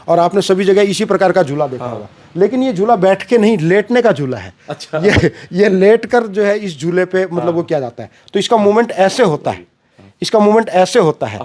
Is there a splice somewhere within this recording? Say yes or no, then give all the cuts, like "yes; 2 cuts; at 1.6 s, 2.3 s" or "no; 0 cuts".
no; 0 cuts